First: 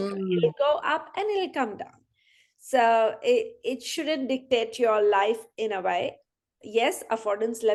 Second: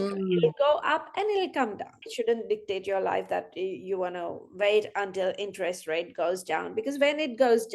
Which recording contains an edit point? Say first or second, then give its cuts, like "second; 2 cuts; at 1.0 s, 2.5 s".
second; 1 cut; at 2.1 s